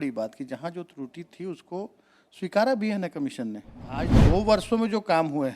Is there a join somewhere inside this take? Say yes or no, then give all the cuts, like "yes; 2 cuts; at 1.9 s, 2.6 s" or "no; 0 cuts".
yes; 1 cut; at 4.1 s